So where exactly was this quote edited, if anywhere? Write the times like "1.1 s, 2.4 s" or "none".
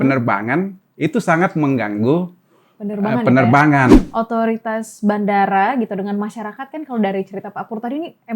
3.9 s